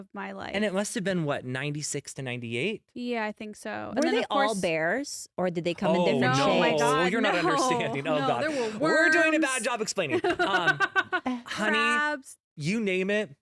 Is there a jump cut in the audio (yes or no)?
no